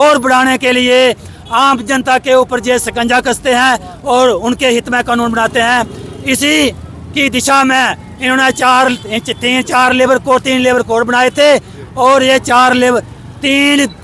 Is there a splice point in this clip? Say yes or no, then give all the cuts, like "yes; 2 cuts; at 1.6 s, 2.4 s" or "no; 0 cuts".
no; 0 cuts